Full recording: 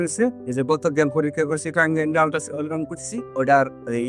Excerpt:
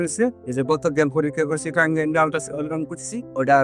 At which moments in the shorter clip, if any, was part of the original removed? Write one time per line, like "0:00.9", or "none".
none